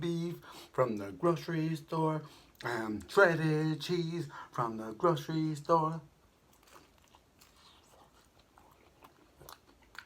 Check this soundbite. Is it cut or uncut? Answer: uncut